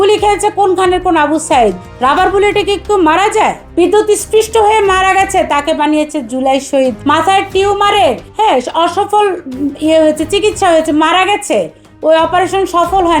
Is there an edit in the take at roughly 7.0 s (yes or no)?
no